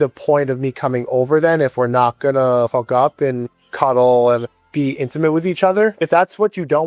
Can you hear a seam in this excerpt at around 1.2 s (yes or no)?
no